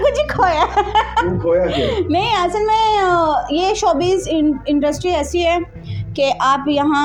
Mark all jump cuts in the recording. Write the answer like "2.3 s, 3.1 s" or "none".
none